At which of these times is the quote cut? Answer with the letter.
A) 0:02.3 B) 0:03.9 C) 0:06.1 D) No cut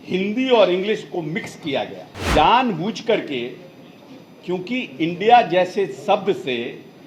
A